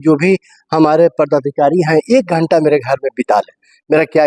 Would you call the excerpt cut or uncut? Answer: uncut